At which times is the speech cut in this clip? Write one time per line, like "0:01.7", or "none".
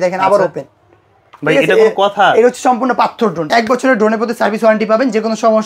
0:03.5